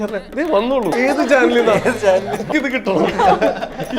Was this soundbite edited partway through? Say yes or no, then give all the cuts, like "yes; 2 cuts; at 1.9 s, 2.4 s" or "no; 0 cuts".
yes; 2 cuts; at 0.9 s, 2.5 s